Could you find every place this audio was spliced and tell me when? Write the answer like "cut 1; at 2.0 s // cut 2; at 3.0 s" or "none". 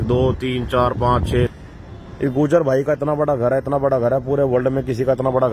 cut 1; at 1.5 s